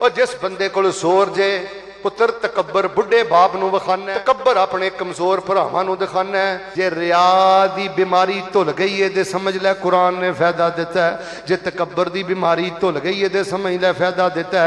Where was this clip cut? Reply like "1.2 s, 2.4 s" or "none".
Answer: 4.1 s, 6.6 s